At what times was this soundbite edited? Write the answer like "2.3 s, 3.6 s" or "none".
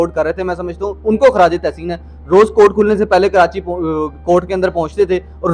none